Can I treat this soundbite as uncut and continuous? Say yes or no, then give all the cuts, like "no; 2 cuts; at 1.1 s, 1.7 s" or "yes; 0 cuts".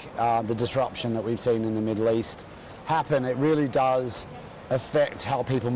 yes; 0 cuts